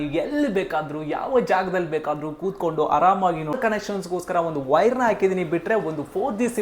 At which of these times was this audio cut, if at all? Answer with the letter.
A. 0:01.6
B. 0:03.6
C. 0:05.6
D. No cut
B